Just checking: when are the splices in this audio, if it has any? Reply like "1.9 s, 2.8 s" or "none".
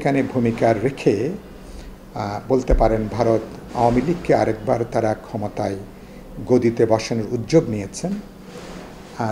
none